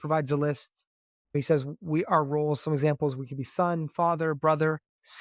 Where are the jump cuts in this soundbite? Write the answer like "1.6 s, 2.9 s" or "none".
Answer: 1.3 s